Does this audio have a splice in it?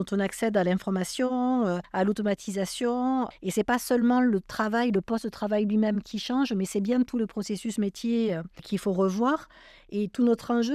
yes; 2 cuts; at 3.4 s, 8.5 s

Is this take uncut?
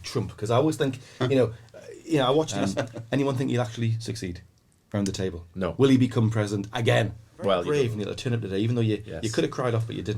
no; 2 cuts; at 2.5 s, 7.7 s

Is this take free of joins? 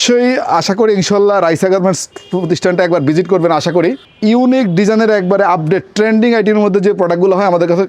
no; 1 cut; at 4.1 s

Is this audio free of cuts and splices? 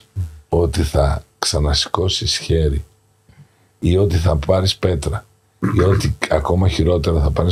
yes; 0 cuts

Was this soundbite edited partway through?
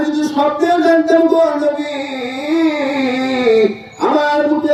no; 0 cuts

